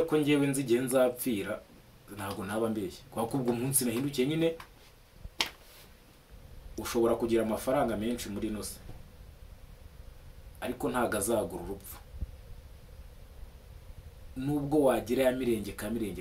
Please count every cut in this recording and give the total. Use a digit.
1